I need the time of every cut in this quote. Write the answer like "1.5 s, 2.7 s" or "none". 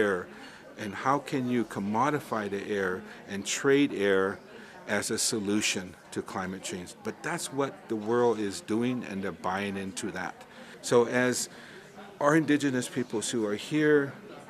10.5 s